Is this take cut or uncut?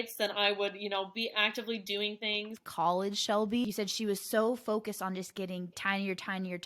cut